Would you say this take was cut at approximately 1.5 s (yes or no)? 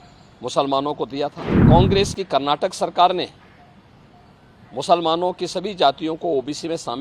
yes